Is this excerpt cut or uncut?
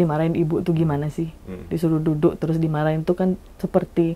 uncut